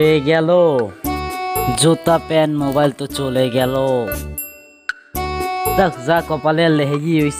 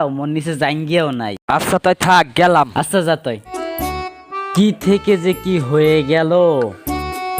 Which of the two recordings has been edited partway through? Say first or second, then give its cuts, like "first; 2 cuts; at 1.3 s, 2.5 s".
second; 1 cut; at 3.6 s